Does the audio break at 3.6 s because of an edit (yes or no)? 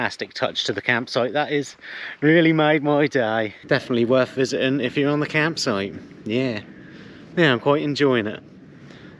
yes